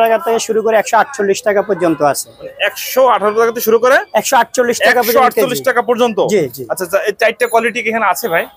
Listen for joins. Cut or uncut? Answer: uncut